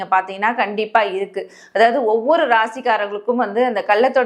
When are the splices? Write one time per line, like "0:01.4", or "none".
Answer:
none